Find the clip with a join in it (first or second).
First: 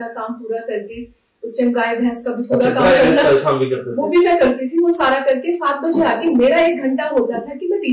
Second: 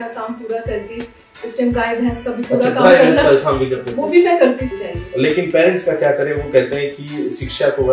second